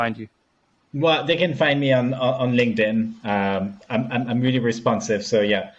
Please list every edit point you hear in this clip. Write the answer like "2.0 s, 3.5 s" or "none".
none